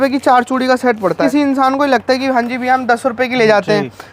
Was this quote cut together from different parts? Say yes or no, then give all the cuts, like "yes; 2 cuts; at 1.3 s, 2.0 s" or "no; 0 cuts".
yes; 1 cut; at 1.2 s